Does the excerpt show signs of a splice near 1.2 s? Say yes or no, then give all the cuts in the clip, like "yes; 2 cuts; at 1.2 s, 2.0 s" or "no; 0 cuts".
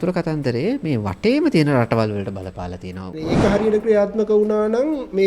no; 1 cut; at 3.2 s